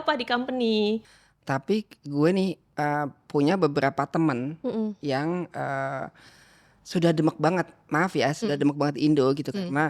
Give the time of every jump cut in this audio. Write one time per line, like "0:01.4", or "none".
0:01.0